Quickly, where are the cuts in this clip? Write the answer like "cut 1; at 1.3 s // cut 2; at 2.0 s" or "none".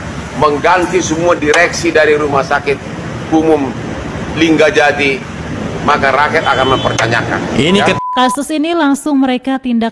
cut 1; at 8.0 s